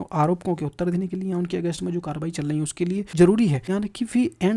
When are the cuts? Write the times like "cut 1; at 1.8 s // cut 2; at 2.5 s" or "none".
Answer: cut 1; at 3.1 s // cut 2; at 3.6 s